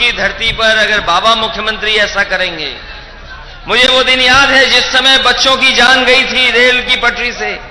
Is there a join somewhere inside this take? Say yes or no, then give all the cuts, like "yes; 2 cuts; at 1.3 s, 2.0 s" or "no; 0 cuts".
no; 0 cuts